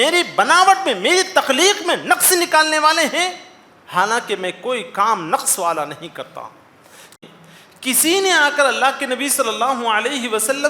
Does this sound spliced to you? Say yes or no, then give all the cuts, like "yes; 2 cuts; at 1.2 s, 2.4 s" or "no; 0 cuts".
yes; 1 cut; at 7.1 s